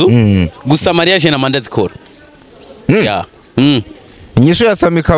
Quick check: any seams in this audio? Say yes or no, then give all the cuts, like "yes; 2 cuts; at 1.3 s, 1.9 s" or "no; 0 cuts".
no; 0 cuts